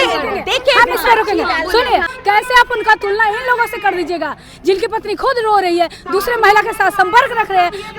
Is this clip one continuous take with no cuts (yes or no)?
no